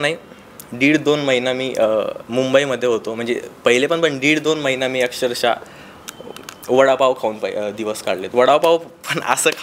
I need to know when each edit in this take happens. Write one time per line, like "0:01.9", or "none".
none